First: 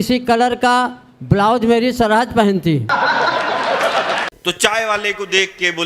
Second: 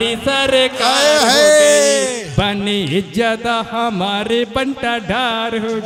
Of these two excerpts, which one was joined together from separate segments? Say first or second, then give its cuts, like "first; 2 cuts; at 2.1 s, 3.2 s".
first; 1 cut; at 4.3 s